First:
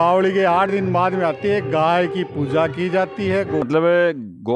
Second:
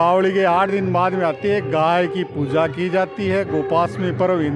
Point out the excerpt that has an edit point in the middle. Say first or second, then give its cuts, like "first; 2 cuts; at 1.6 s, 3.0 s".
first; 1 cut; at 3.7 s